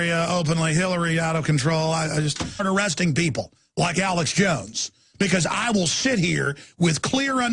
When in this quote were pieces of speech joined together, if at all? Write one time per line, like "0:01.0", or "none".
none